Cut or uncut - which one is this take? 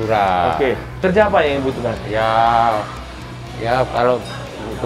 cut